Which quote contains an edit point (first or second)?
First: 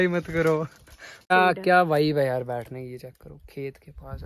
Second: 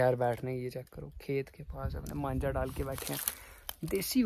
first